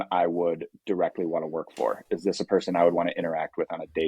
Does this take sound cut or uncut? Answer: uncut